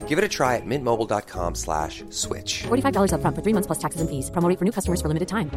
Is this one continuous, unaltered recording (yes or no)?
yes